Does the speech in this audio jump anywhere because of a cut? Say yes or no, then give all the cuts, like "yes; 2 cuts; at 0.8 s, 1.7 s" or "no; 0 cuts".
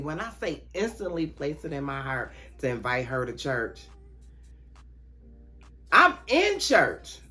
no; 0 cuts